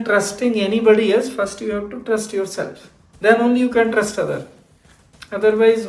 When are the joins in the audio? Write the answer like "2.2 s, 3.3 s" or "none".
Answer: none